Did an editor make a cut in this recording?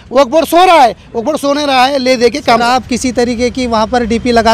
yes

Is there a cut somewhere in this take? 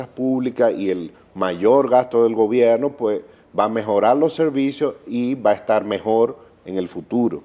no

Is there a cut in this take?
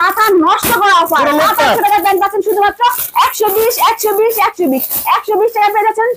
no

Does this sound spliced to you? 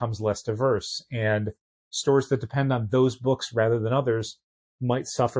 no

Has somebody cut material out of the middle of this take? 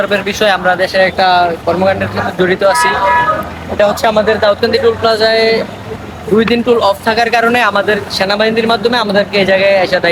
no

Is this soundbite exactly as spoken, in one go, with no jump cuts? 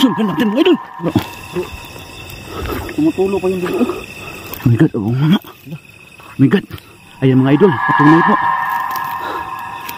no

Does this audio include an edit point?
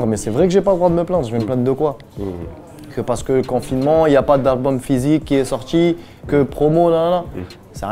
no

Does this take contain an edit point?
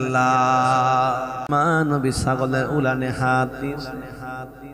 yes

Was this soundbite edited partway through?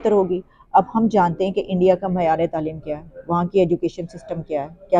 no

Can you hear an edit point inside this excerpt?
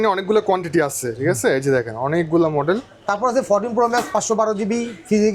no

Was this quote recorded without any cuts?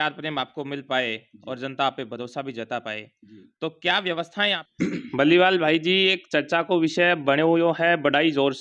no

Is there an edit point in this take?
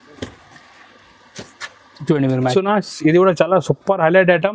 yes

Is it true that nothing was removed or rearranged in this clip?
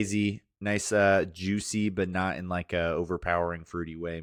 yes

